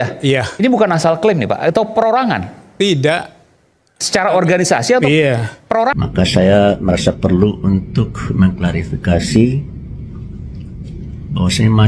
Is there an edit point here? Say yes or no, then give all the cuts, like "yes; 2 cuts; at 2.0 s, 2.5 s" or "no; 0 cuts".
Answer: yes; 1 cut; at 5.9 s